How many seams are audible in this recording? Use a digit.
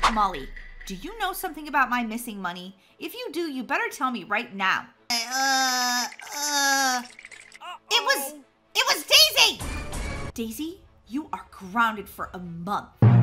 2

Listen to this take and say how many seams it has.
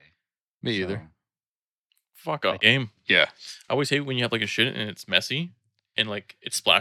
1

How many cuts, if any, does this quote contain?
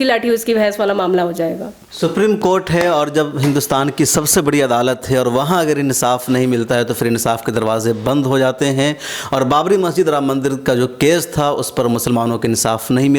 0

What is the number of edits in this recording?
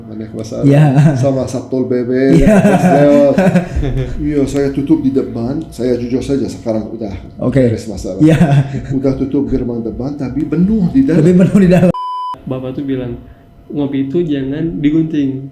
1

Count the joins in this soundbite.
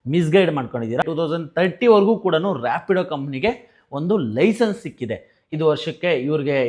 2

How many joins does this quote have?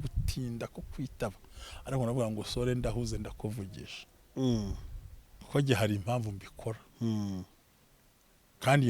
0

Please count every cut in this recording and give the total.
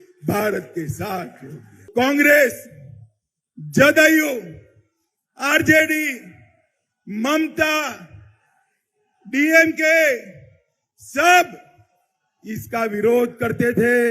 1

